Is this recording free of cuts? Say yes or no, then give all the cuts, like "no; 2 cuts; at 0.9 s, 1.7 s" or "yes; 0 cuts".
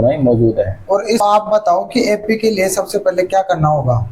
no; 1 cut; at 1.2 s